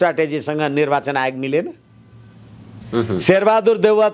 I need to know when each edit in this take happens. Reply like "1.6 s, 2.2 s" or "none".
2.7 s